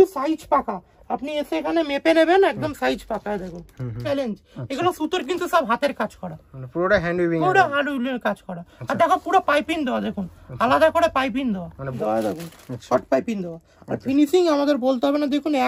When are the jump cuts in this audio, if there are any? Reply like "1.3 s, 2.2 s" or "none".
4.0 s, 11.9 s